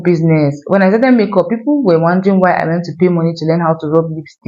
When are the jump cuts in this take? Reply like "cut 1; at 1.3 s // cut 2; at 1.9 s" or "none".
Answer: none